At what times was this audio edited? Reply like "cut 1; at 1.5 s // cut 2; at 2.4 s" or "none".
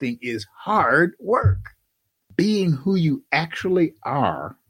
none